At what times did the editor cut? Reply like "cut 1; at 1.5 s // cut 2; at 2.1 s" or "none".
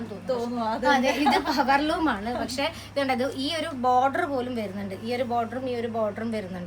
none